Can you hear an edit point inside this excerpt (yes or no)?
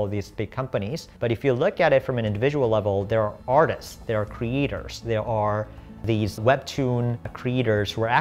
no